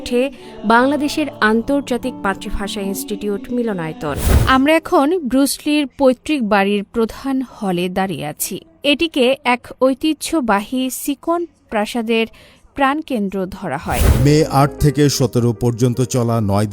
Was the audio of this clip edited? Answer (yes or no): yes